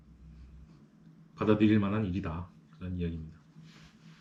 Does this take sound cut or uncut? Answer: uncut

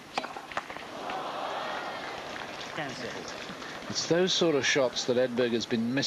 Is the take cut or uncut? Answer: uncut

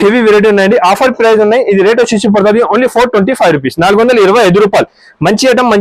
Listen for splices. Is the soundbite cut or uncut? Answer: uncut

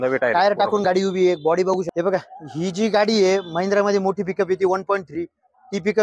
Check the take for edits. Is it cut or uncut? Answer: cut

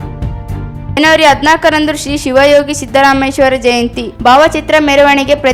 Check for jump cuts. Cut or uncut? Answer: uncut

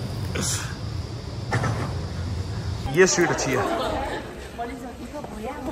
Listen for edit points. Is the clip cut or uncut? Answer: cut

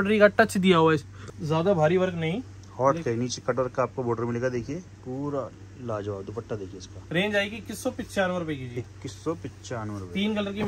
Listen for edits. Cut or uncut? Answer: uncut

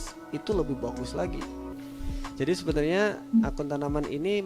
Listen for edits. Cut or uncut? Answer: cut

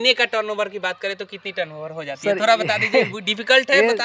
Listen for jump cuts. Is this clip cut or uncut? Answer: uncut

